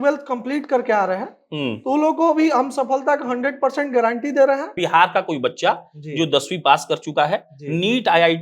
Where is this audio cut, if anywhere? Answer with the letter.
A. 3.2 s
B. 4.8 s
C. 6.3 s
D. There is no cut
B